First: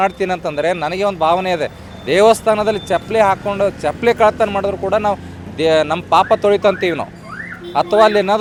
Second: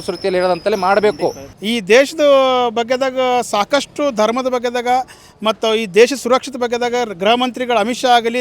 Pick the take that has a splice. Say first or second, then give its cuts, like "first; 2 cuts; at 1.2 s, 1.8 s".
second; 1 cut; at 1.5 s